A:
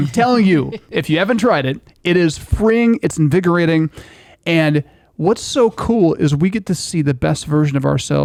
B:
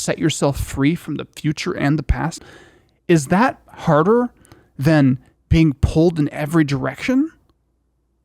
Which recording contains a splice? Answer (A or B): B